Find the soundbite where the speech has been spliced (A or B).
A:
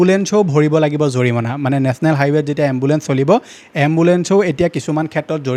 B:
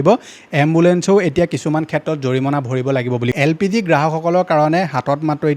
B